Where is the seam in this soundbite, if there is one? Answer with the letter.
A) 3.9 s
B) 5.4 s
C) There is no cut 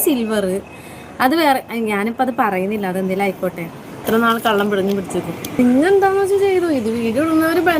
B